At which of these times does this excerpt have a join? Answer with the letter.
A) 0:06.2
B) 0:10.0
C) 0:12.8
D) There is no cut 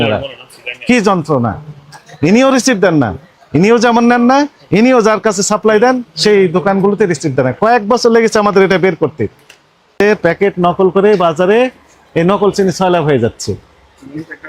B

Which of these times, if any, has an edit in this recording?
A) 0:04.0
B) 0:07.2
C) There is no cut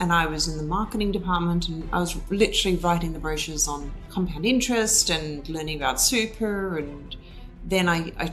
A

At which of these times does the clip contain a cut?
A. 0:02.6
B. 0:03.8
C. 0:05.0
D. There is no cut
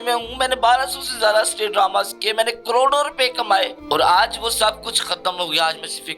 B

